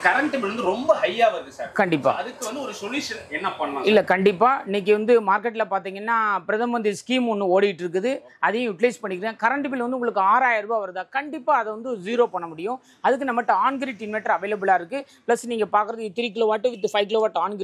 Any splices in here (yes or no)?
no